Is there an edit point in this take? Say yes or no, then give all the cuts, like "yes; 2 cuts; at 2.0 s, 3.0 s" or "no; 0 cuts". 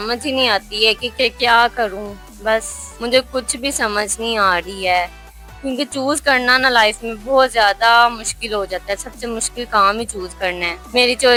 no; 0 cuts